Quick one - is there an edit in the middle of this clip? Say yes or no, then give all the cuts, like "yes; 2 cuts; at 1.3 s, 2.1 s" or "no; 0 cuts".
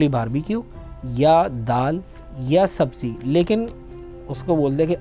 no; 0 cuts